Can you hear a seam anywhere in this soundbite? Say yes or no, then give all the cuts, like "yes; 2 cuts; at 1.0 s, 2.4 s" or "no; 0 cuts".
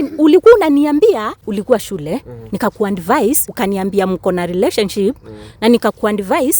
yes; 2 cuts; at 1.4 s, 3.5 s